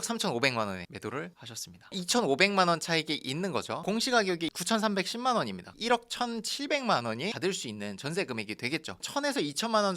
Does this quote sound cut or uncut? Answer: cut